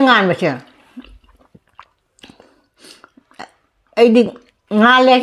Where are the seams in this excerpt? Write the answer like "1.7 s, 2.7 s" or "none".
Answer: none